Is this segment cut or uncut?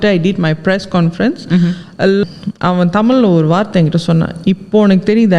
cut